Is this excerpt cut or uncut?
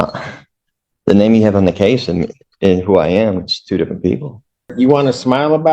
cut